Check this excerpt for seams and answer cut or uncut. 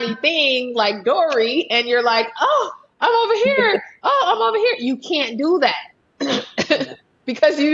uncut